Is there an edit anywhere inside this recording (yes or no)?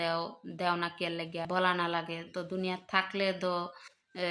yes